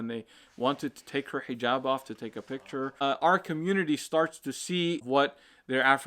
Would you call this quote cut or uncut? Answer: cut